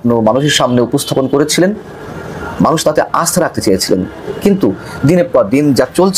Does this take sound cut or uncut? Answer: uncut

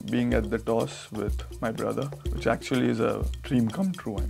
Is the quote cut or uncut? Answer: cut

